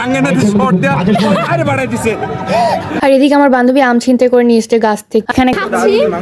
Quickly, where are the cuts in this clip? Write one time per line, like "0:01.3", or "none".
0:02.9
0:05.5